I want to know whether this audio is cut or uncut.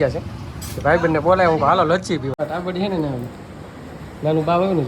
cut